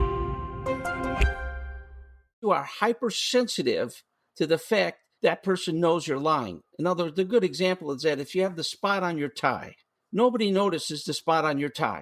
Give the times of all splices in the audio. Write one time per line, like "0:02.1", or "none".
0:02.4